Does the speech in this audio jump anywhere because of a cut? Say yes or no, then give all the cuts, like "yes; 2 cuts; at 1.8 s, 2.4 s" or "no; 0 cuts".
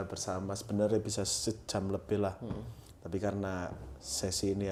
no; 0 cuts